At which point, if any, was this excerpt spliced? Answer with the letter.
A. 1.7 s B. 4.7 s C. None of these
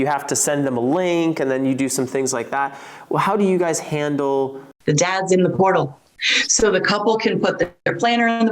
B